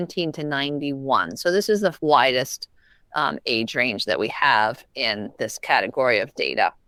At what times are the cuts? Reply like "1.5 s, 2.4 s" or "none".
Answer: none